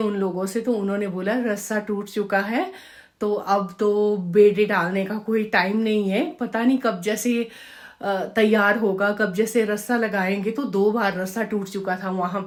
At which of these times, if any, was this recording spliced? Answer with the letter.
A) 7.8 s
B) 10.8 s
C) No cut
C